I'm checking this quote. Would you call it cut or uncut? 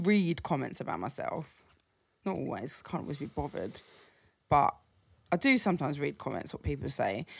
uncut